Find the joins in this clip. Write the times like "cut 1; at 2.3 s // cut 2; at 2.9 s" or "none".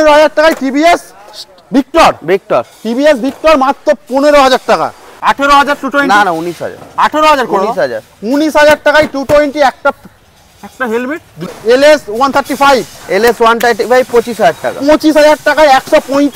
cut 1; at 5.1 s // cut 2; at 11.6 s